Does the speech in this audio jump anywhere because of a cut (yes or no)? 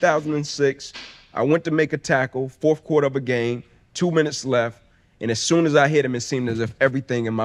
no